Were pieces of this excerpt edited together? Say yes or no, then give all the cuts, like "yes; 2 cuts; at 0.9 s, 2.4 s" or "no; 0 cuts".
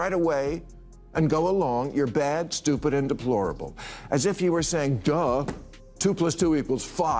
no; 0 cuts